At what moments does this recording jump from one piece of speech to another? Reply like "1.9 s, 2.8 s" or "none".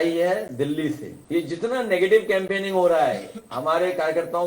1.1 s